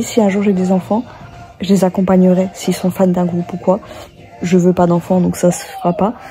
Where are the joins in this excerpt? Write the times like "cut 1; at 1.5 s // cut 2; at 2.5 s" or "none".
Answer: none